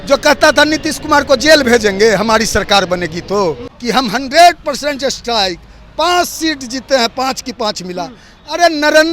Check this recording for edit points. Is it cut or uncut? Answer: cut